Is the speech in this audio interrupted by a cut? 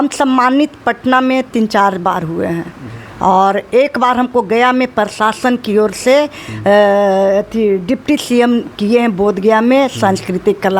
no; 0 cuts

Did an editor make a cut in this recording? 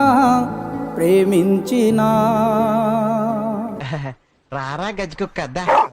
yes; 1 cut; at 3.8 s

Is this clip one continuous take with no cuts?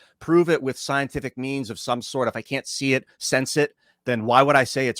no; 1 cut; at 3.9 s

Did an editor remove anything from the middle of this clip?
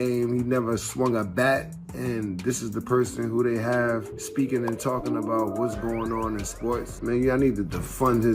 yes; 2 cuts; at 4.2 s, 6.9 s

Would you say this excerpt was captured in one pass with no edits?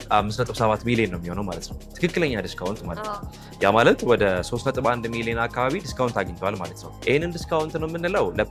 yes; 0 cuts

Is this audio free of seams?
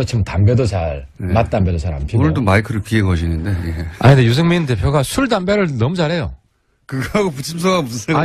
no; 1 cut; at 7.1 s

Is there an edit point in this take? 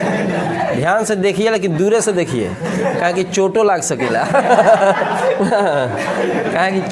no; 0 cuts

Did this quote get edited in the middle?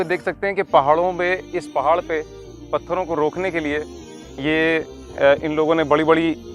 no; 0 cuts

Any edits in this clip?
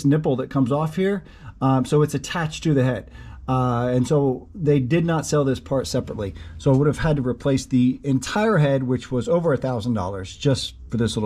no; 0 cuts

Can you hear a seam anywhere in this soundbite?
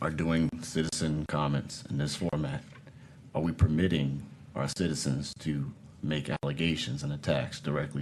no; 0 cuts

